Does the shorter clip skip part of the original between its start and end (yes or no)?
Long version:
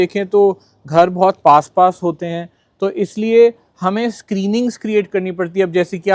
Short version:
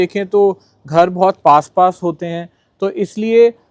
no